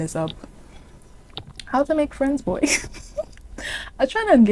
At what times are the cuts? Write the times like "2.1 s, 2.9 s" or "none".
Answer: none